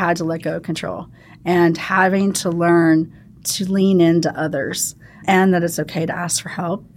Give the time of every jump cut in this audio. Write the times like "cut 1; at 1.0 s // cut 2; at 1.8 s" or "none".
none